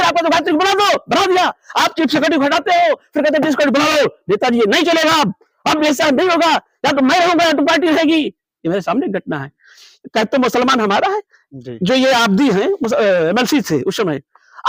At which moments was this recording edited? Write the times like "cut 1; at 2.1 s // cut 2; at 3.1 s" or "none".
none